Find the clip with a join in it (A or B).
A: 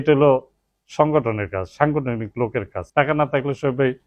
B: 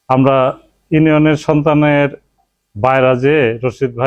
A